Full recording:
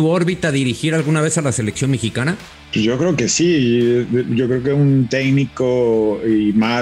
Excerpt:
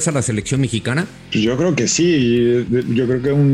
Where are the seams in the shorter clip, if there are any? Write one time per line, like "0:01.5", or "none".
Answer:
0:01.2